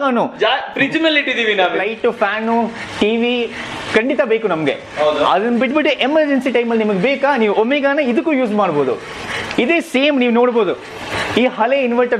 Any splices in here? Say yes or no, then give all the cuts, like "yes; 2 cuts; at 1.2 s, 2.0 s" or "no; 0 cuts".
yes; 1 cut; at 1.7 s